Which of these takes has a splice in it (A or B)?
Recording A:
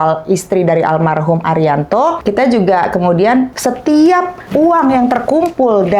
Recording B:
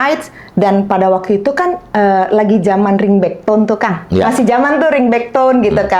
A